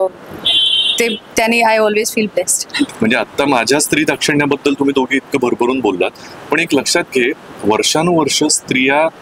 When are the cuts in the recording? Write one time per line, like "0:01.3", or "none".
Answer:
0:02.9